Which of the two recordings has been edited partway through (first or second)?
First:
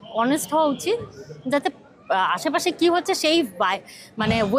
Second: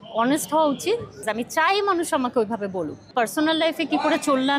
second